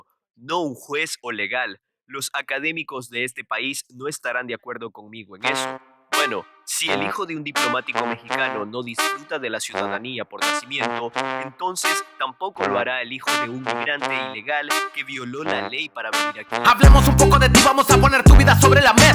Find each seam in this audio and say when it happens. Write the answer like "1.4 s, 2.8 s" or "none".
18.0 s